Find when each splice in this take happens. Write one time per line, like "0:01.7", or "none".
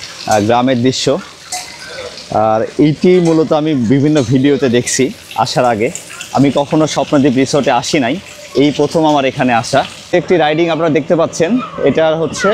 0:10.0